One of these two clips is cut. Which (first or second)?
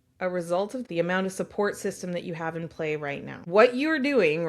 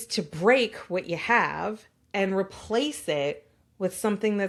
first